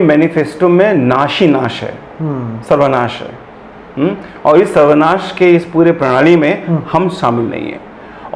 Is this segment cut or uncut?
uncut